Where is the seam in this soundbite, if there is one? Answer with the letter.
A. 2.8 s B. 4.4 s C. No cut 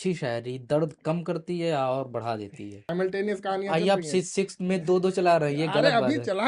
A